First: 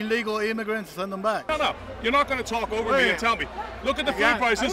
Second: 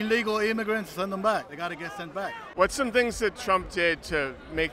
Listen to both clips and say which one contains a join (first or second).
first